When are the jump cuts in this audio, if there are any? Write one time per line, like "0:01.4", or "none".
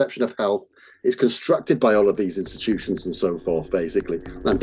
none